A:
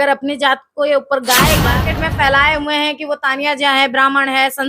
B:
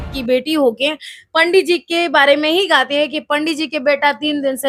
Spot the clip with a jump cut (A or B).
A